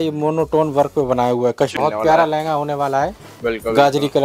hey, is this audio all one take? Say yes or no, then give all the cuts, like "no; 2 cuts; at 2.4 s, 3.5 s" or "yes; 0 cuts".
no; 1 cut; at 1.7 s